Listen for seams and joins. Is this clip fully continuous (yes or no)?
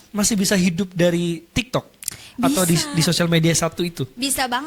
yes